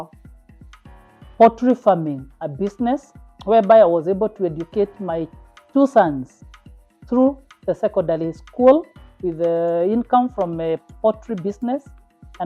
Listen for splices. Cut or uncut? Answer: uncut